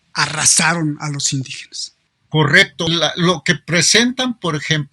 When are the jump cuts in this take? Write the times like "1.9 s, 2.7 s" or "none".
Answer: 2.9 s

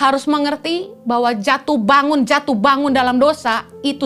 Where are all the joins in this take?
none

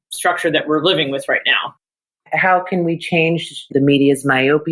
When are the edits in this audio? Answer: 2.1 s, 3.7 s

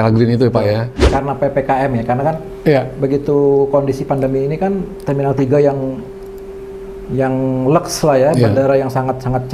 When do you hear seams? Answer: 1.1 s

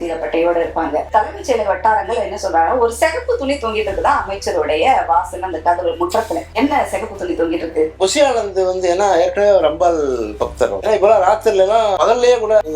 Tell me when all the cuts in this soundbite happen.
1.1 s, 6.5 s, 8.0 s, 10.8 s

